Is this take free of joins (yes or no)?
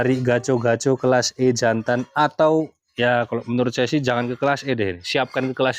yes